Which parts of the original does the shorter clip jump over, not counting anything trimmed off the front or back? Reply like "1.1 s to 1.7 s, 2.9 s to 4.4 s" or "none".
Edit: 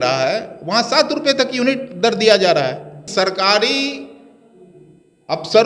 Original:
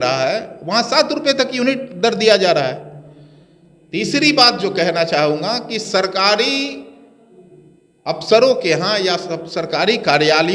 3.1 s to 5.8 s